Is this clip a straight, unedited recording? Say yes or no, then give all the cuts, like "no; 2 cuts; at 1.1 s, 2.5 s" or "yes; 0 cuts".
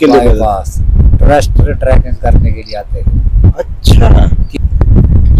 no; 1 cut; at 4.5 s